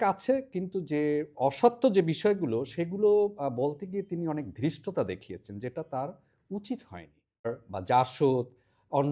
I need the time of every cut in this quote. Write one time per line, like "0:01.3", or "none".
0:07.4

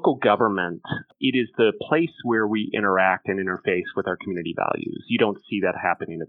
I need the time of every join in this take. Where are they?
0:01.1

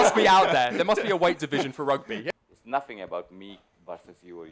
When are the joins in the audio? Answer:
0:02.2

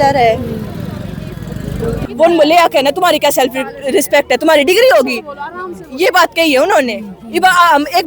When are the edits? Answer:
0:02.0

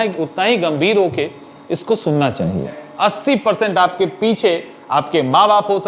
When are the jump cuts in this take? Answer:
0:02.8

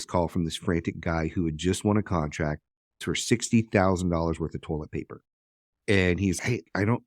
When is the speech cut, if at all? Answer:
0:03.0

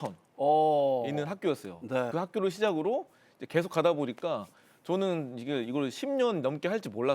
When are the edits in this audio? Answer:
0:02.1

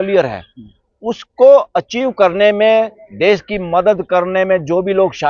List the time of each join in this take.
none

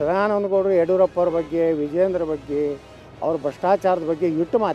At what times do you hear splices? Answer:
none

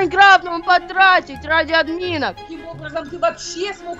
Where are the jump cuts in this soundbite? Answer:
0:02.5

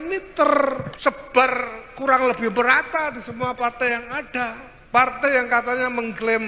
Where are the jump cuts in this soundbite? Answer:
0:00.9
0:04.7

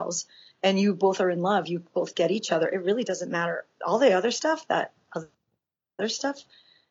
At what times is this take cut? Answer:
none

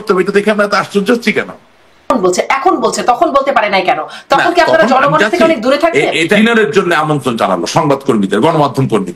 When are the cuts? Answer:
0:02.1
0:06.4

